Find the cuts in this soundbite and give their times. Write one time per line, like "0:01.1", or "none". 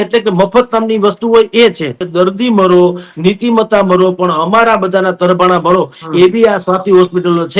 0:02.0